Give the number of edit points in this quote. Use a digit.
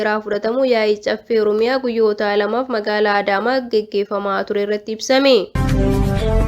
1